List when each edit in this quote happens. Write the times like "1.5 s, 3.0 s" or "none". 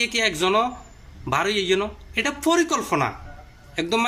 none